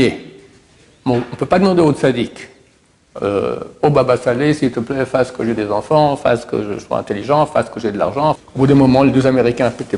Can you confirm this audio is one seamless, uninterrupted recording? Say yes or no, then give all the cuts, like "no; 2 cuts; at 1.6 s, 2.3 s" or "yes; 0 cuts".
no; 1 cut; at 8.4 s